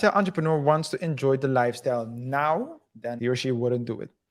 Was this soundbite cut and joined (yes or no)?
yes